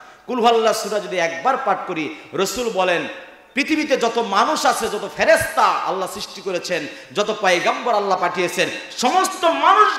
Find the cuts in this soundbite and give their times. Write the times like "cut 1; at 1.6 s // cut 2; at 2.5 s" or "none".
none

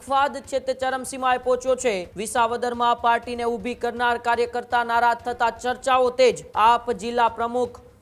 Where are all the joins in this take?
cut 1; at 2.1 s // cut 2; at 6.5 s

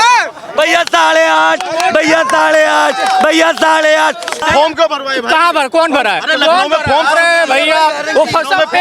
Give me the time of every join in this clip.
cut 1; at 4.4 s

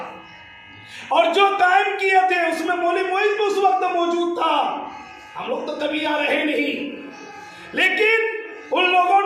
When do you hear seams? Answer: none

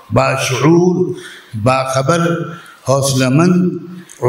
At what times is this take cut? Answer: none

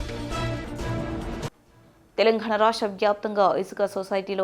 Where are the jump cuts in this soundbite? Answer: cut 1; at 1.5 s

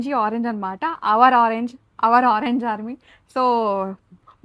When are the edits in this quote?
none

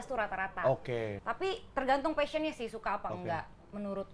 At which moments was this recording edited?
cut 1; at 1.1 s

